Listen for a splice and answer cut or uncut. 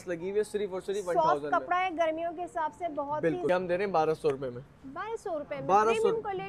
cut